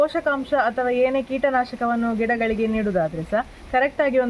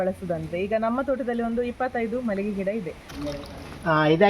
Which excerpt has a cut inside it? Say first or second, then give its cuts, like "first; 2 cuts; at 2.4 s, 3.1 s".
second; 1 cut; at 3.1 s